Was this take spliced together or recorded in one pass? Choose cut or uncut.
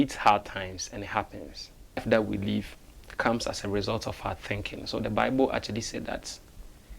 cut